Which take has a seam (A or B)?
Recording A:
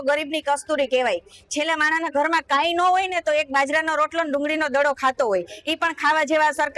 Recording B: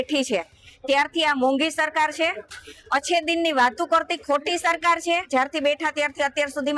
B